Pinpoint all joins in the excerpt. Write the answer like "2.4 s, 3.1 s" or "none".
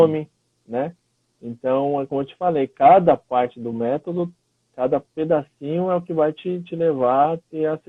none